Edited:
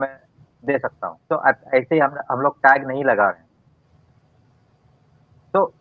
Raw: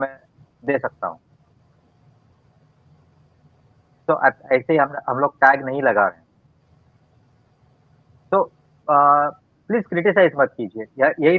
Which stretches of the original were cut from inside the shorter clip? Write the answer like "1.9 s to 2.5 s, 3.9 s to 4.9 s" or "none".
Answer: 1.2 s to 4.0 s